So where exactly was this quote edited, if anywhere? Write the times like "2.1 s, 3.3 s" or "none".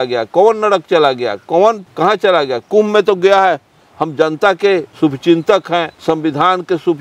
none